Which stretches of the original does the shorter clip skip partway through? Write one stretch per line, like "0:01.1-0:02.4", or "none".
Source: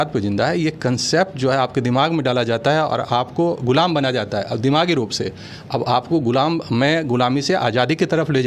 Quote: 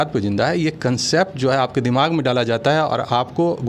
none